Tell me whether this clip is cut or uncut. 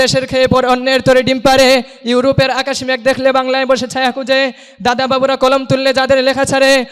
uncut